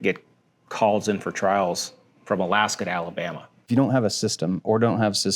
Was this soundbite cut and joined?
yes; 1 cut; at 3.7 s

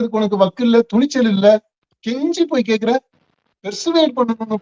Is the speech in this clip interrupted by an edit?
no; 0 cuts

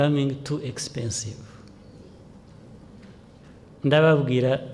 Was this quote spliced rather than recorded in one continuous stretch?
no; 0 cuts

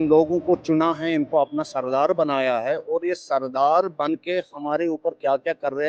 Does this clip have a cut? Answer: no; 0 cuts

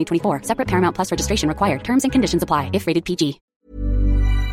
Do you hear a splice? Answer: yes; 1 cut; at 3.5 s

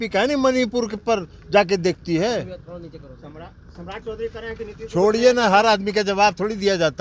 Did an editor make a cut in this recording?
no; 0 cuts

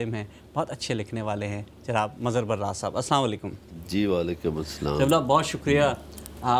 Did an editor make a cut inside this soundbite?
no; 0 cuts

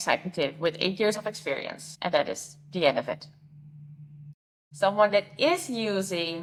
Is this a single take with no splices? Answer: yes; 0 cuts

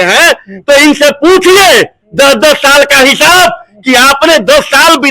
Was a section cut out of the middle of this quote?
no; 0 cuts

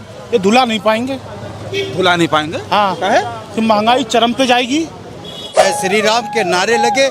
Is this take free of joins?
no; 1 cut; at 5.6 s

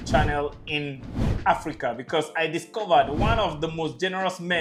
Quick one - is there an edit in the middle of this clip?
no; 0 cuts

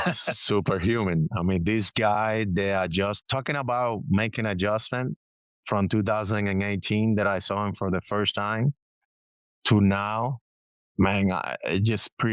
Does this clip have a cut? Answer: no; 0 cuts

